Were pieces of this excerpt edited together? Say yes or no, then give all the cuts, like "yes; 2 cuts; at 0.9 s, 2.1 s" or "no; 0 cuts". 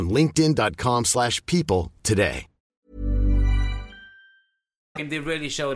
no; 0 cuts